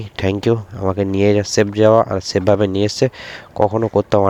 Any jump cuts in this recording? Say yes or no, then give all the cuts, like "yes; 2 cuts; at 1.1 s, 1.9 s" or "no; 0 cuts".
no; 0 cuts